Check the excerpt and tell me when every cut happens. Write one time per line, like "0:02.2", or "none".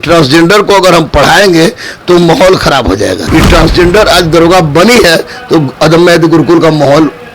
0:03.2